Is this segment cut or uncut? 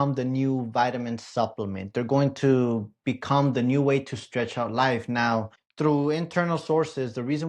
cut